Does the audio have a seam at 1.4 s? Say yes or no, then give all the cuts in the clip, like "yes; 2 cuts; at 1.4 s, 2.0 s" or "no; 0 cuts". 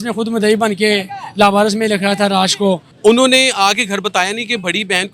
no; 1 cut; at 2.9 s